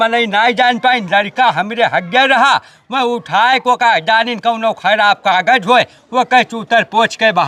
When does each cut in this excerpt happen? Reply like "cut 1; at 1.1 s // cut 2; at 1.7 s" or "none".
none